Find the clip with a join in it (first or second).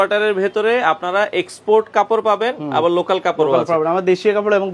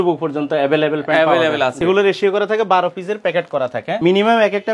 second